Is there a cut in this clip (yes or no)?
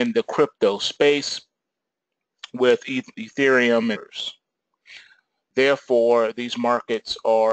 no